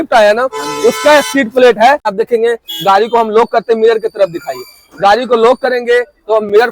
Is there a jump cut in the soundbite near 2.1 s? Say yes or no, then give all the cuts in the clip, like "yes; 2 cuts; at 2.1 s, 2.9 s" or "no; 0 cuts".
yes; 1 cut; at 2.1 s